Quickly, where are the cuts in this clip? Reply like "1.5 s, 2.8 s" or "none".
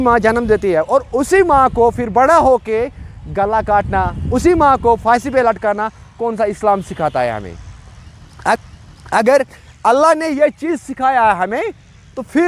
none

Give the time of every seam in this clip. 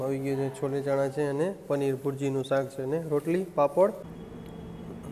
4.1 s

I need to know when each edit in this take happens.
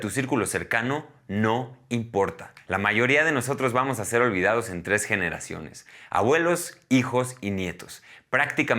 2.5 s

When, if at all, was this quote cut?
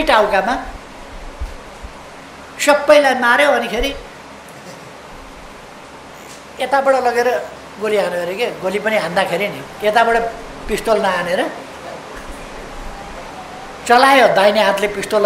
none

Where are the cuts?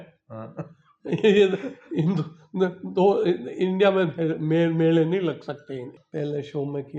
6.0 s

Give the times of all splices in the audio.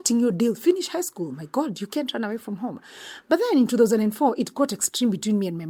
none

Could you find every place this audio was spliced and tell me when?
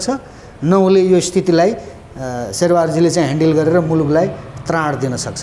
none

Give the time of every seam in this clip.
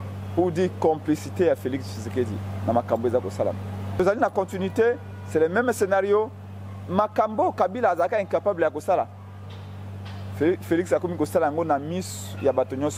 4.0 s

